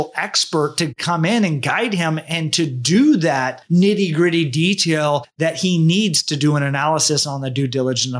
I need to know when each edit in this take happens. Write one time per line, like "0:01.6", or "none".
0:05.3

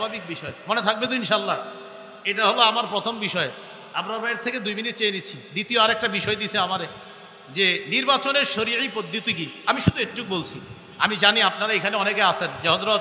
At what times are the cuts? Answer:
none

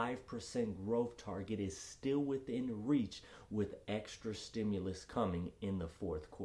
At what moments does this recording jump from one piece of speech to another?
none

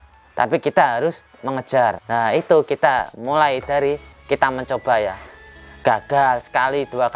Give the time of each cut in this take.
0:02.0

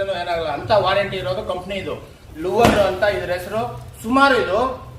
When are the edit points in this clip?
0:02.2

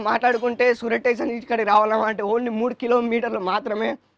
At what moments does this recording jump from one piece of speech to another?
none

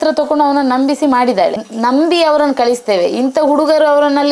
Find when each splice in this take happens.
0:01.6

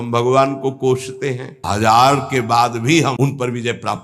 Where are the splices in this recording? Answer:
0:01.6
0:03.2

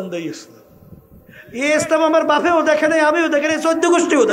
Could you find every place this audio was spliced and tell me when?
none

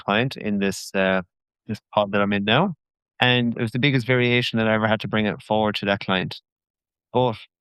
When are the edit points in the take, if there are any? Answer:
none

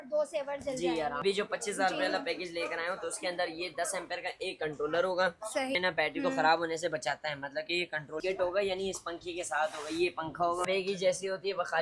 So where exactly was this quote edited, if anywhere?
0:01.2
0:05.8
0:08.2
0:10.7

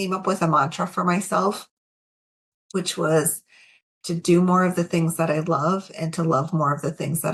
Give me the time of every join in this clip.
none

